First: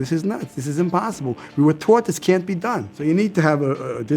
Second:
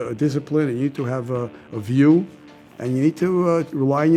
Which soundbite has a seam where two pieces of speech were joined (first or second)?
first